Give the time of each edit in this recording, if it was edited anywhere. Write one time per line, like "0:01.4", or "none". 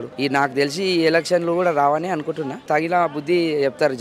0:02.6